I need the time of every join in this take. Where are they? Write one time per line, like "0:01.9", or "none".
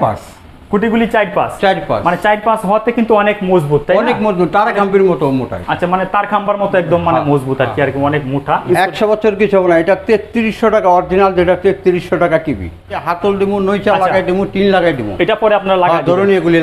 0:08.6
0:13.0